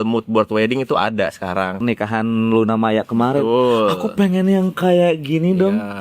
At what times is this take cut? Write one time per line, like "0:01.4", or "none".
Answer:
0:01.8